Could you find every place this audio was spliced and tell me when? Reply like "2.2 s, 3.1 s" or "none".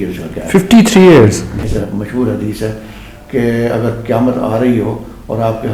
1.6 s